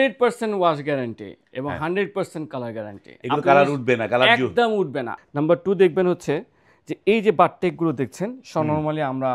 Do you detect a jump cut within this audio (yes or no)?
yes